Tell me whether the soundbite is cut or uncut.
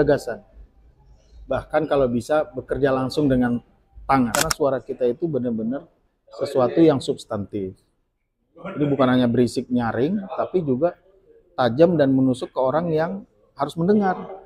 cut